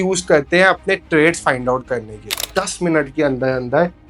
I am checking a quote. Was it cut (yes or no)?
yes